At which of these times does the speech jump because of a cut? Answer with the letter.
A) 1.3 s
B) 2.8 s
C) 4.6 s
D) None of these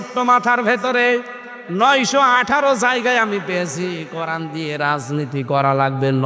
D